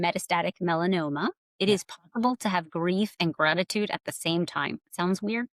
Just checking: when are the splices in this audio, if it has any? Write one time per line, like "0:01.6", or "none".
0:01.5